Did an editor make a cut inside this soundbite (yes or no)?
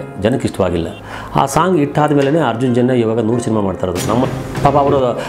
yes